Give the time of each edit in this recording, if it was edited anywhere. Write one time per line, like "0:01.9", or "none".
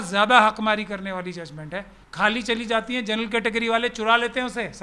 0:02.0